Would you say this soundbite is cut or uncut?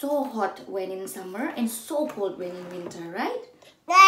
uncut